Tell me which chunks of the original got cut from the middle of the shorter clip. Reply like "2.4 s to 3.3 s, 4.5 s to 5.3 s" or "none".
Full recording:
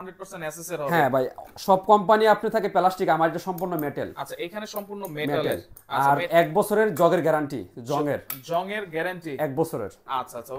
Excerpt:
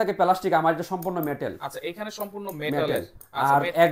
none